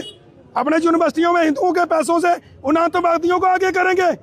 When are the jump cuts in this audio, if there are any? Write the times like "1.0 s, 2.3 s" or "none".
none